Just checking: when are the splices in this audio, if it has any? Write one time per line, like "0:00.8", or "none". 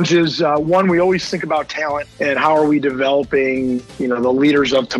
0:02.1
0:03.9